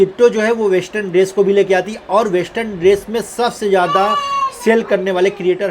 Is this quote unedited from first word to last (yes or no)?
yes